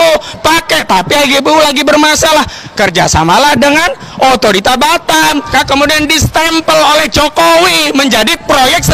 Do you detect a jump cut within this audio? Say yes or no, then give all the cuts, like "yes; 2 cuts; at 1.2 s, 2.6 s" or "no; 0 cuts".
yes; 1 cut; at 5.5 s